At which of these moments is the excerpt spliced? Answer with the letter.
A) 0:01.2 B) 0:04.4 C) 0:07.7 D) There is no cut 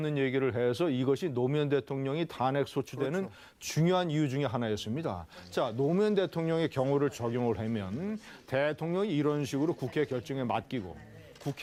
D